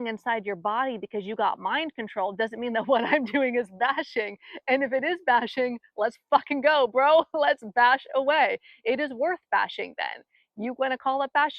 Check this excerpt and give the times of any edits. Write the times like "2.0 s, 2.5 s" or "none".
none